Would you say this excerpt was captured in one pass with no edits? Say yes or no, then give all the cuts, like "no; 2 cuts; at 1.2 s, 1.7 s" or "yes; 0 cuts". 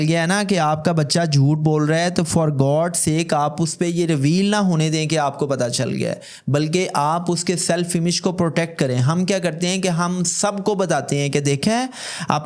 yes; 0 cuts